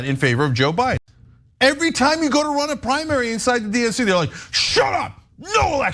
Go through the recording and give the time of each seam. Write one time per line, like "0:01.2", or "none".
0:01.0